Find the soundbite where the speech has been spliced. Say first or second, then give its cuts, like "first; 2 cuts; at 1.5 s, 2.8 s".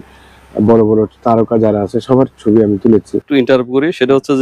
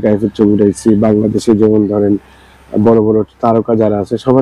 first; 1 cut; at 3.2 s